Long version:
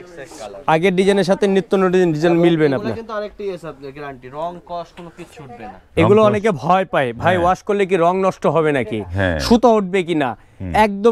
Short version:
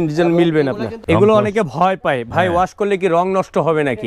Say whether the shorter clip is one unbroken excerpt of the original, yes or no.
no